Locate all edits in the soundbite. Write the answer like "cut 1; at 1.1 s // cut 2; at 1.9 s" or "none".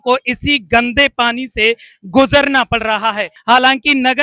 cut 1; at 3.3 s